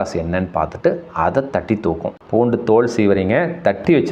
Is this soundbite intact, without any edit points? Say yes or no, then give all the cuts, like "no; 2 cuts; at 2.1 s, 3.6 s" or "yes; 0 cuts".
no; 1 cut; at 2.2 s